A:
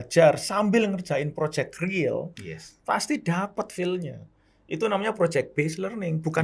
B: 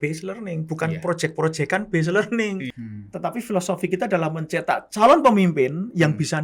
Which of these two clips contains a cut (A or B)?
B